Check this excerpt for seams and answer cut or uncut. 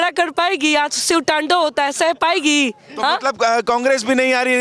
uncut